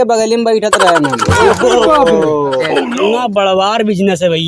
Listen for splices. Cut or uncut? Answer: cut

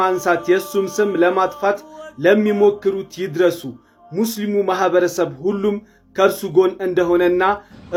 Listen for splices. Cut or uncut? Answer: uncut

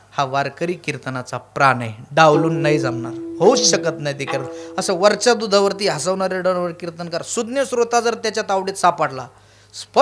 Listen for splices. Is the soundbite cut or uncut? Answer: uncut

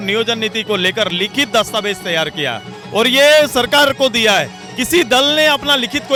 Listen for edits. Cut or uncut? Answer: uncut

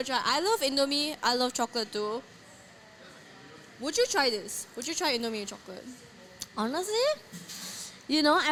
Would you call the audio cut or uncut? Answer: uncut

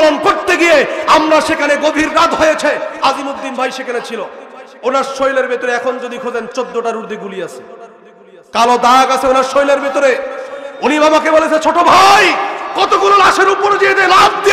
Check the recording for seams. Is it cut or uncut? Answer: uncut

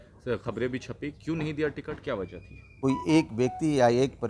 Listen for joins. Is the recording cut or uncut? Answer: cut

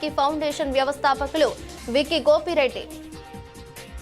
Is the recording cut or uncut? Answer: cut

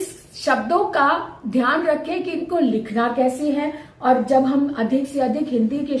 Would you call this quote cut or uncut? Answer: uncut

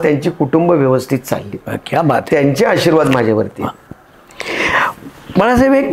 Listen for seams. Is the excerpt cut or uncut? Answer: uncut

